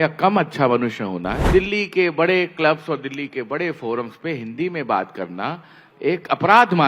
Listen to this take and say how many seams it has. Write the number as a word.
one